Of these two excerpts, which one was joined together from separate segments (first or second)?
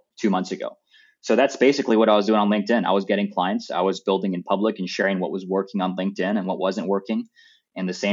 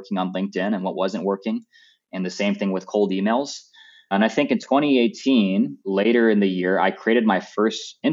second